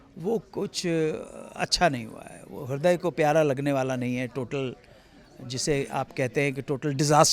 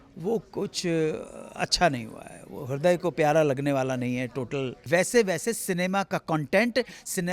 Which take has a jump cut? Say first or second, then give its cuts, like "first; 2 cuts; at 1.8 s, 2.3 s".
second; 1 cut; at 4.8 s